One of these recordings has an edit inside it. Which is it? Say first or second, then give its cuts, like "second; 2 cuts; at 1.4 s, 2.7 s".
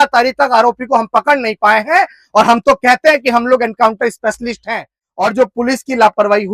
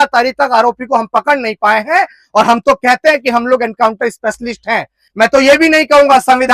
first; 1 cut; at 5.0 s